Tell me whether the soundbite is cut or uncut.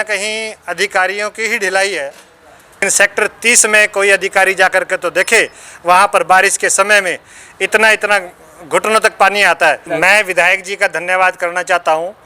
cut